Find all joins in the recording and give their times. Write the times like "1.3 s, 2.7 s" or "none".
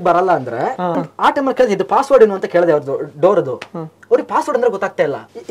1.1 s